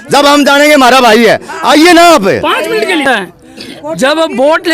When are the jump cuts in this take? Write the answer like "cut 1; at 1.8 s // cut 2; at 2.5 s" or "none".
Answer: cut 1; at 3.1 s